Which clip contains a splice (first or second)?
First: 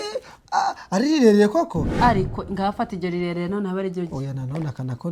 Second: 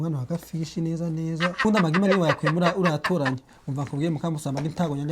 second